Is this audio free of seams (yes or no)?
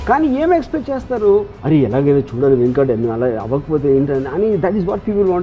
yes